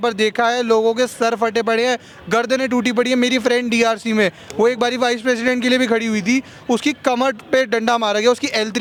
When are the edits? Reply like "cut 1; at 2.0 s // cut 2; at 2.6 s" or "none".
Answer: none